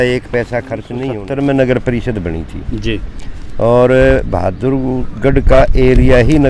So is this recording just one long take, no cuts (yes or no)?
no